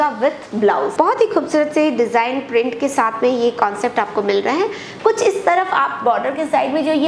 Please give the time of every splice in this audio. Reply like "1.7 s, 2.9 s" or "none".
0.9 s